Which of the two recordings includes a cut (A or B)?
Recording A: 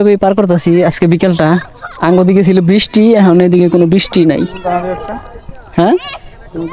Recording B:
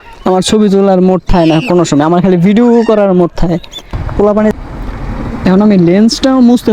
B